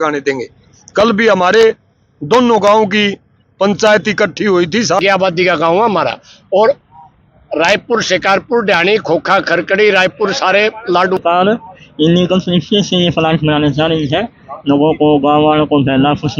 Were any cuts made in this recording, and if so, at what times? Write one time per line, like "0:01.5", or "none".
0:05.0
0:11.2